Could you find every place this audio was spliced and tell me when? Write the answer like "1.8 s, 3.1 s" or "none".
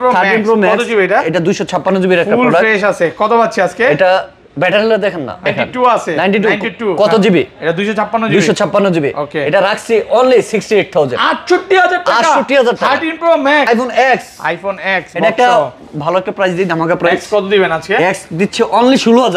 5.5 s, 13.7 s